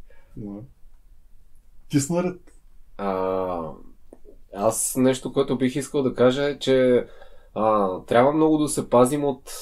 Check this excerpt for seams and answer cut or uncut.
uncut